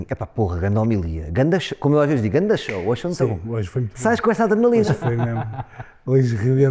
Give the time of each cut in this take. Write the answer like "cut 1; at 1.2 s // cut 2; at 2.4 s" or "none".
none

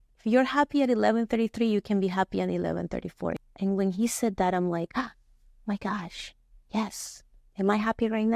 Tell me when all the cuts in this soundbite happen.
cut 1; at 3.4 s

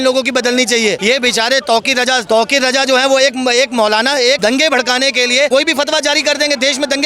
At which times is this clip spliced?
cut 1; at 1.0 s // cut 2; at 2.2 s // cut 3; at 4.4 s // cut 4; at 5.5 s

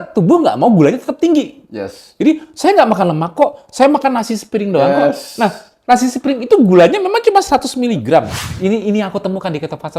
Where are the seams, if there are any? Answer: cut 1; at 8.4 s

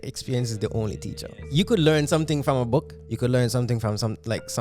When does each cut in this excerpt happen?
cut 1; at 1.4 s // cut 2; at 3.0 s

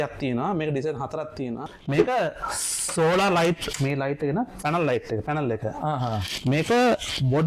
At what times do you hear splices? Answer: cut 1; at 1.6 s

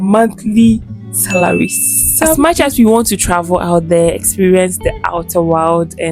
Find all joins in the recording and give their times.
cut 1; at 2.3 s

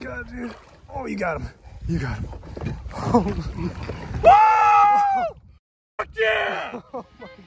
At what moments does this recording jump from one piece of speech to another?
none

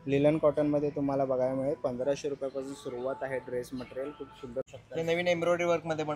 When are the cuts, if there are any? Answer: cut 1; at 4.6 s

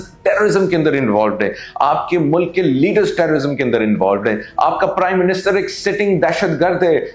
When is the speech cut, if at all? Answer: none

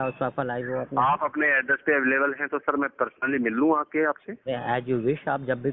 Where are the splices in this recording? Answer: none

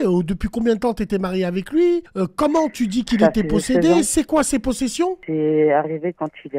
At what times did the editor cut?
cut 1; at 2.1 s // cut 2; at 5.2 s

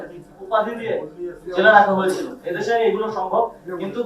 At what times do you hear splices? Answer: none

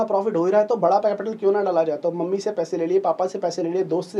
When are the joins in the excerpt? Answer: none

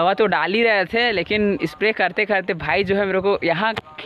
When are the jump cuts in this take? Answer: none

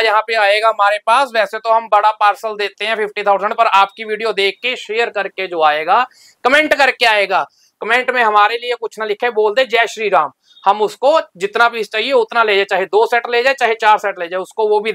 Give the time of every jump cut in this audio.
none

